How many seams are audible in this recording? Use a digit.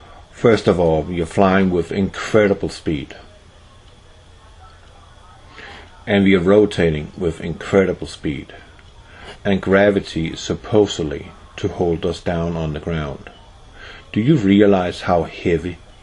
1